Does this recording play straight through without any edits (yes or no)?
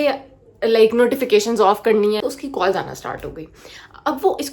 no